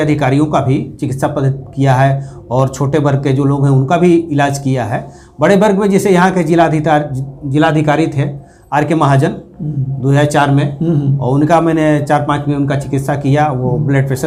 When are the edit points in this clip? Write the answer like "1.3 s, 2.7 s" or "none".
none